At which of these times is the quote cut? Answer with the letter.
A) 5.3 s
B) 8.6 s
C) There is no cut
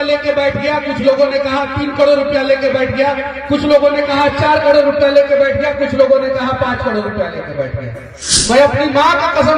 B